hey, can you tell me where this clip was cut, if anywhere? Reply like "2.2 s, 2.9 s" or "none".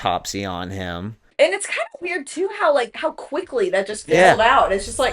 1.3 s